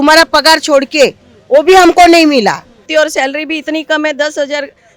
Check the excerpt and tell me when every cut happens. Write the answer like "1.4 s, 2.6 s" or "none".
2.9 s

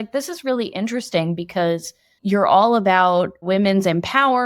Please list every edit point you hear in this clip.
2.1 s, 3.5 s

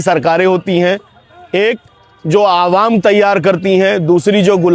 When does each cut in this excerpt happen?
none

